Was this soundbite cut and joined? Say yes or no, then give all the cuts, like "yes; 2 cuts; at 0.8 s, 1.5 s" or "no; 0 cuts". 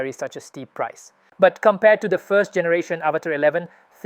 yes; 1 cut; at 1.2 s